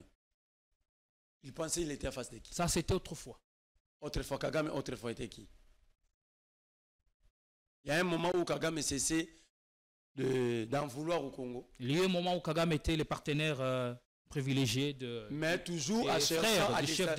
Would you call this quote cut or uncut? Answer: uncut